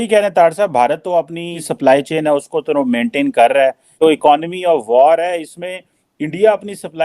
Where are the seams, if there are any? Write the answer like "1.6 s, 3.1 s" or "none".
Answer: 1.6 s, 3.9 s